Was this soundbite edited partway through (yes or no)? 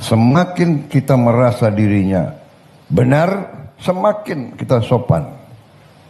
no